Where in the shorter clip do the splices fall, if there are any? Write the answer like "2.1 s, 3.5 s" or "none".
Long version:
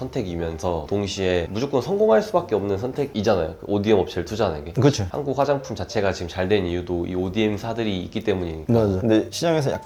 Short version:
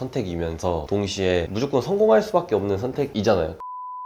none